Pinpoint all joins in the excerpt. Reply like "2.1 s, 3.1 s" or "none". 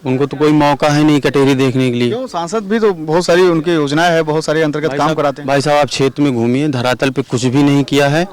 none